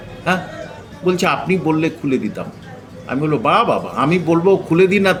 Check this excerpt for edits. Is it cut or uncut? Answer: uncut